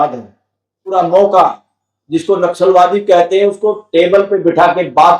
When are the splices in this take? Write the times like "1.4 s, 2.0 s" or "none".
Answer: 0.9 s